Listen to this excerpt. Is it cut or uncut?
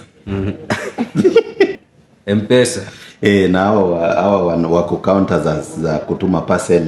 cut